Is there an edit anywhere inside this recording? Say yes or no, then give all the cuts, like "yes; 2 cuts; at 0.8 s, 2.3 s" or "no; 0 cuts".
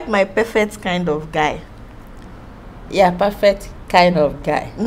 no; 0 cuts